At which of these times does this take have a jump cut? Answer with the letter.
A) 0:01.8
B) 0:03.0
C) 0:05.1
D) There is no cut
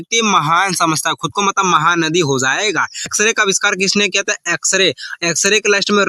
B